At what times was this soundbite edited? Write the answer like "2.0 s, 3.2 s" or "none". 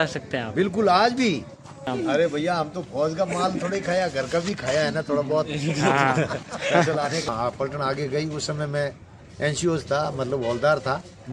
1.9 s, 7.3 s